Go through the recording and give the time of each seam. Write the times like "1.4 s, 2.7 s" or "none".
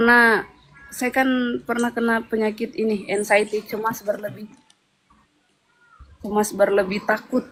none